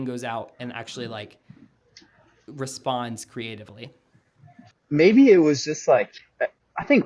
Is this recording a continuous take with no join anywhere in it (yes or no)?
no